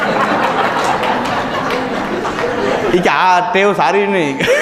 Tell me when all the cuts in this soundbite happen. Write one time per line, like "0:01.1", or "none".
none